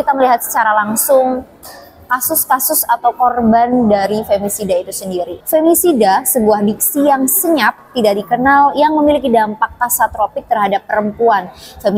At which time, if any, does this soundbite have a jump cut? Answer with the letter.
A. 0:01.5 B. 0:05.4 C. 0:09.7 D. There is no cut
B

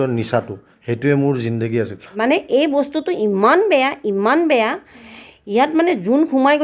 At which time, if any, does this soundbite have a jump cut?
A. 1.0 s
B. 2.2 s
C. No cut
B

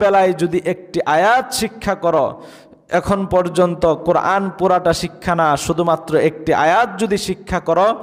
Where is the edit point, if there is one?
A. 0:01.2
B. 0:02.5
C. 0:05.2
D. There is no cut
D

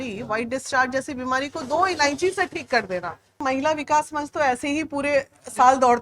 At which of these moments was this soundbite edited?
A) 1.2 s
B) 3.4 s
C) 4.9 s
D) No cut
B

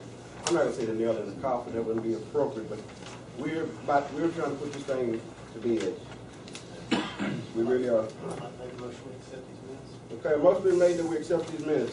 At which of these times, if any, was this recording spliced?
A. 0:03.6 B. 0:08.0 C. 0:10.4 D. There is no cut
D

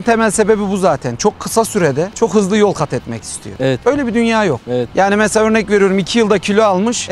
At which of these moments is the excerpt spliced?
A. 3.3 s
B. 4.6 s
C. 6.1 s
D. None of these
D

